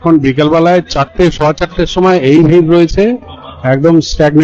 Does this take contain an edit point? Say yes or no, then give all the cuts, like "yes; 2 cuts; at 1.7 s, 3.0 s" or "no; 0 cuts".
no; 0 cuts